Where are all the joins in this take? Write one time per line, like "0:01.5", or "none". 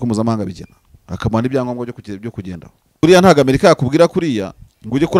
0:03.0